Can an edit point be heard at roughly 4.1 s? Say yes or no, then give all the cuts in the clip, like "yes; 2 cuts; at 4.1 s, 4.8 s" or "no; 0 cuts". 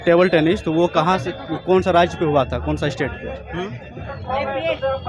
yes; 1 cut; at 4.1 s